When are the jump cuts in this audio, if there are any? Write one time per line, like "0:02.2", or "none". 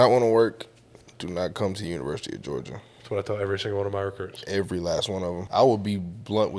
0:05.4